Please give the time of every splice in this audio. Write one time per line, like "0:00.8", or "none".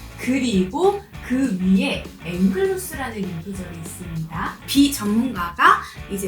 0:02.2
0:04.6